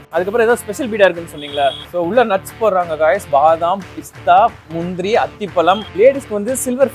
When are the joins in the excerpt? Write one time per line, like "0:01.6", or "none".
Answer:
0:01.8
0:05.9